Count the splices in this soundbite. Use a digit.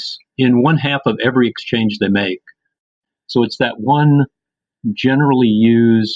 1